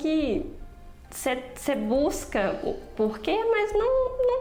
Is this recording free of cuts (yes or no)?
yes